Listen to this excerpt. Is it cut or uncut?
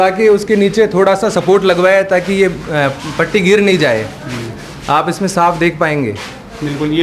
uncut